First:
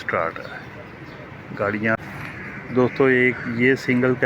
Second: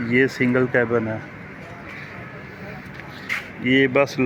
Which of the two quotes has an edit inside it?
first; 1 cut; at 2.0 s

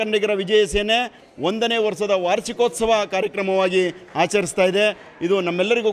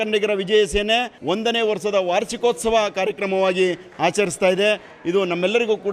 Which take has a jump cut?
second; 1 cut; at 1.1 s

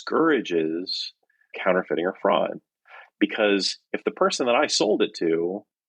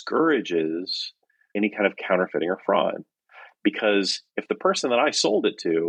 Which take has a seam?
first; 1 cut; at 1.5 s

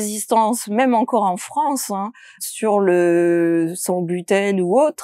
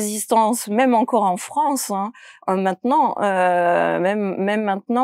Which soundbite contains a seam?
first; 1 cut; at 2.5 s

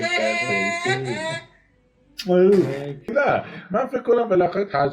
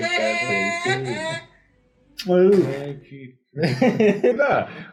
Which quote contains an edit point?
first; 1 cut; at 3.1 s

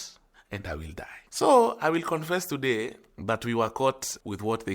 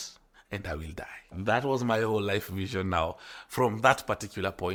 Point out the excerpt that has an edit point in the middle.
first; 1 cut; at 1.3 s

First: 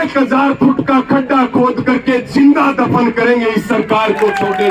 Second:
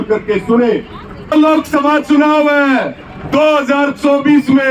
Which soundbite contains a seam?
second; 1 cut; at 1.3 s

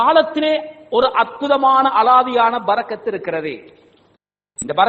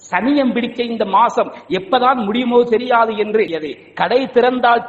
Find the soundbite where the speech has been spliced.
second; 1 cut; at 3.5 s

